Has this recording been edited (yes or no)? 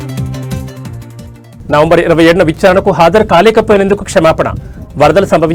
yes